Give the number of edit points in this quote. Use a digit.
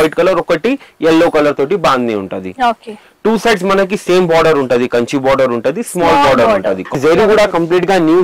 1